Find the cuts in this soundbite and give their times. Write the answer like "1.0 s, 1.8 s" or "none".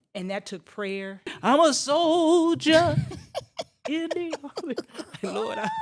1.3 s